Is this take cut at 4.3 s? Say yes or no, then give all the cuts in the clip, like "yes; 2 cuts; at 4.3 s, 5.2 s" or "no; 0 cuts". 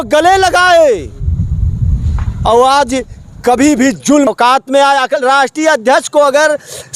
yes; 1 cut; at 4.3 s